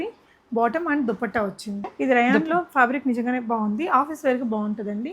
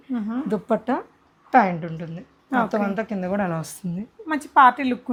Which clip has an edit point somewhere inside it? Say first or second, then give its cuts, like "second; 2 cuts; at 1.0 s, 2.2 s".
first; 1 cut; at 1.9 s